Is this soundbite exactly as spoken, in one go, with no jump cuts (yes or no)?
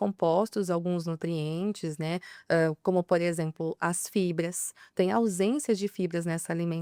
yes